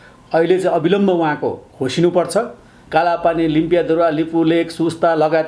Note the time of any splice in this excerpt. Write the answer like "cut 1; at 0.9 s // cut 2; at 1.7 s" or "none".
cut 1; at 2.8 s